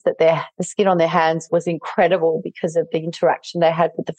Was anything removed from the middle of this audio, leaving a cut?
yes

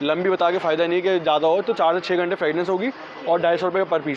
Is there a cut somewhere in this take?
no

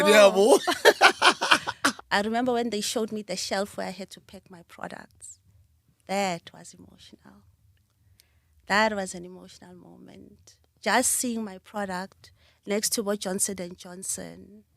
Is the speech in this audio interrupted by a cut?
yes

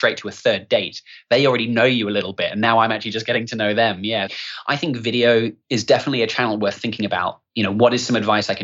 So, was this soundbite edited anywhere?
yes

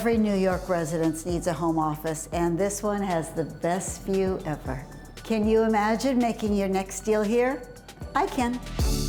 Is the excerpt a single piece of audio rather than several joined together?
yes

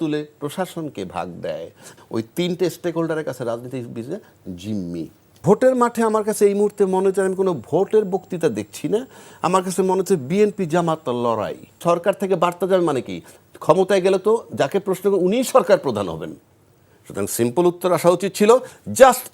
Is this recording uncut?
no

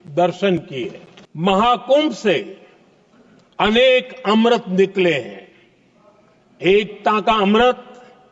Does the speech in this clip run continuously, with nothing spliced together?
no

